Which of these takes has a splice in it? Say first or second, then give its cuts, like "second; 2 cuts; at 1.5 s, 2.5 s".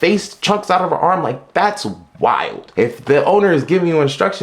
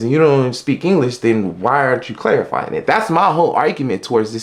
first; 1 cut; at 2.6 s